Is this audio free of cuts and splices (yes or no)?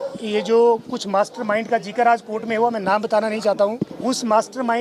no